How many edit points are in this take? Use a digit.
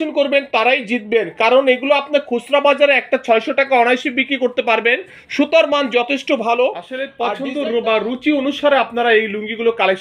1